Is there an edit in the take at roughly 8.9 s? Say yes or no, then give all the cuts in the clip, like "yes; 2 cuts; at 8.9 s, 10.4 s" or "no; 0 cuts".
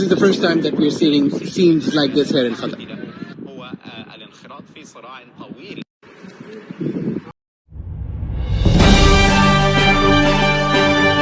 no; 1 cut; at 7.3 s